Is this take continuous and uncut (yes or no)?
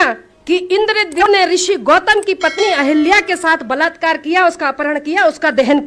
no